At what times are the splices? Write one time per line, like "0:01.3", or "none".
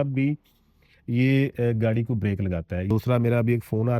0:02.9